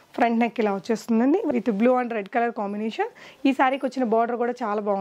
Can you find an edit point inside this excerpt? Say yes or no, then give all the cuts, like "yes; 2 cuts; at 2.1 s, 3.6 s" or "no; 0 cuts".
yes; 1 cut; at 1.5 s